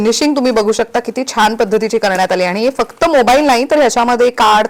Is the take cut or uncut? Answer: uncut